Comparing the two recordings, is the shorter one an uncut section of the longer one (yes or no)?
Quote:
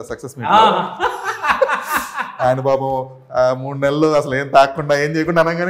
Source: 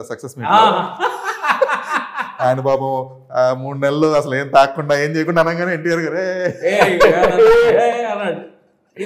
yes